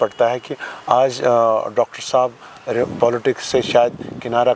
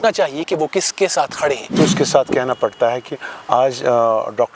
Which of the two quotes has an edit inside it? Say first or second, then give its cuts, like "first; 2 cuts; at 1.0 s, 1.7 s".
second; 1 cut; at 1.7 s